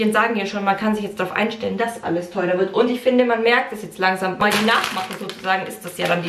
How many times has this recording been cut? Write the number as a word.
one